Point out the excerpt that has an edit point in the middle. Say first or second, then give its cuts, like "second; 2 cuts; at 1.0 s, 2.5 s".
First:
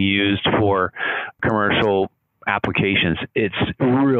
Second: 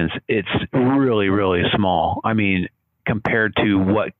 first; 1 cut; at 1.4 s